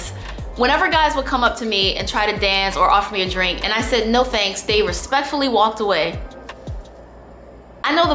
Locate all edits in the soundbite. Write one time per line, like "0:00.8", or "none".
none